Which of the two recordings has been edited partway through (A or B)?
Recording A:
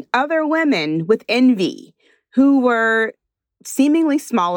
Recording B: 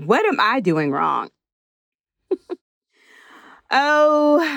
B